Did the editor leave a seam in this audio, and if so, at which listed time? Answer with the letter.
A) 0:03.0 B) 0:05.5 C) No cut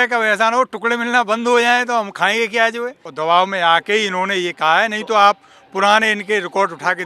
A